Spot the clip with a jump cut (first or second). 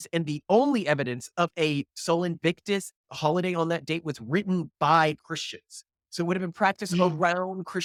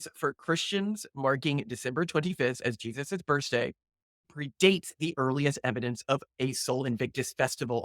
second